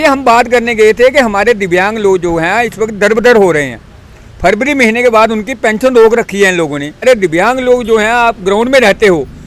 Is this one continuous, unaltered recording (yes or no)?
no